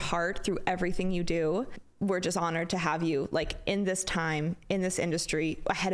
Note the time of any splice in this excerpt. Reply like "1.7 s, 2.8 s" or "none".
1.8 s